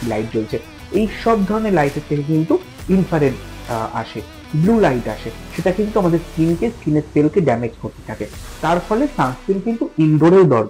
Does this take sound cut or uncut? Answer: uncut